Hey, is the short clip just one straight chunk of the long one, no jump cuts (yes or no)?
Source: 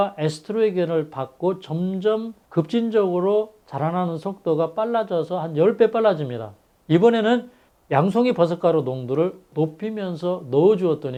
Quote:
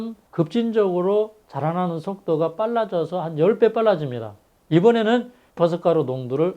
no